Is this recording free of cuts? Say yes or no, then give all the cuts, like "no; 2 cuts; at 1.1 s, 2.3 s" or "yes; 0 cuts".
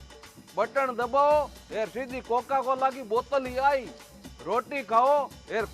yes; 0 cuts